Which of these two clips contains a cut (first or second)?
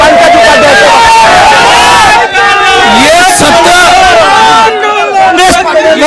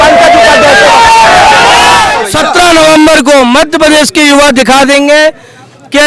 second